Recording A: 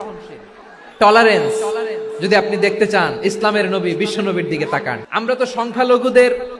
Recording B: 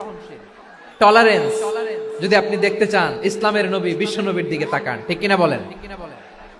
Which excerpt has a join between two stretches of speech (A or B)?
A